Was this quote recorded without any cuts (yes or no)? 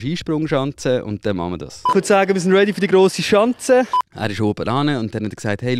no